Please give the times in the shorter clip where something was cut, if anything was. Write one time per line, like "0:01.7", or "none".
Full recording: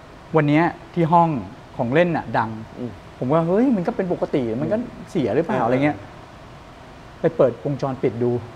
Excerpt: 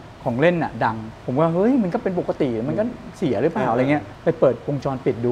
0:01.1
0:04.1

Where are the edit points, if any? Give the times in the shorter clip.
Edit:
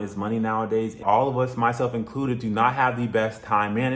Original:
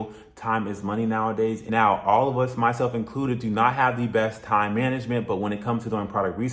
0:01.0

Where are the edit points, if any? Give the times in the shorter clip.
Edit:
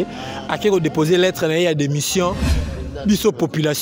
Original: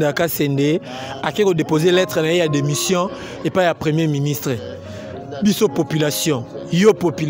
0:02.5

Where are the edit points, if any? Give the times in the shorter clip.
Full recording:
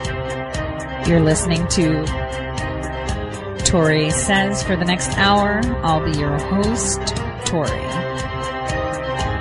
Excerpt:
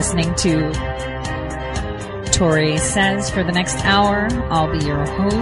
none

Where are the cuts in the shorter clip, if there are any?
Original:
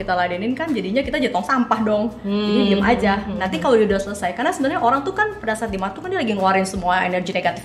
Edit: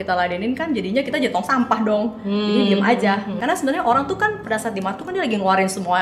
0:03.4

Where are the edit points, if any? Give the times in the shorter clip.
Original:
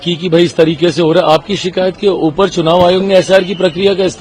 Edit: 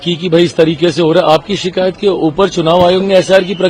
none

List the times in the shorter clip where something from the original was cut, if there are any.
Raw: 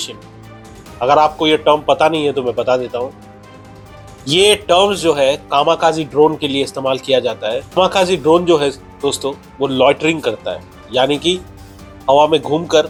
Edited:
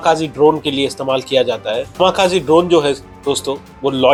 none

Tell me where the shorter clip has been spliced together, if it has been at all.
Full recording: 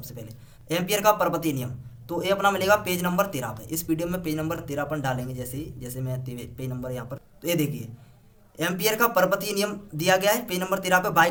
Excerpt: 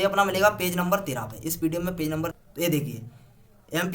0:02.4

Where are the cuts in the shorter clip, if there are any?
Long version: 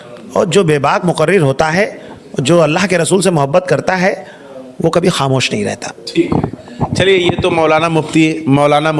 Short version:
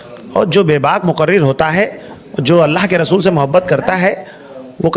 none

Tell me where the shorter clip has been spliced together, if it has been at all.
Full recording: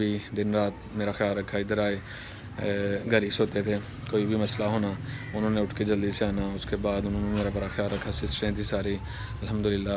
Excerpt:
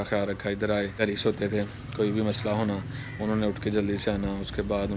0:01.0

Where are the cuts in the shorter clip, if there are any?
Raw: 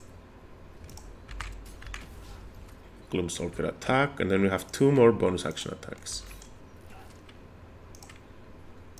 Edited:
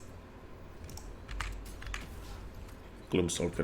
none

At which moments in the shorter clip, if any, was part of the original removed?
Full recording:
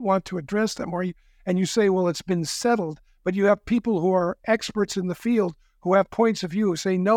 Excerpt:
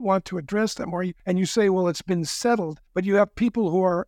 0:01.2
0:02.8

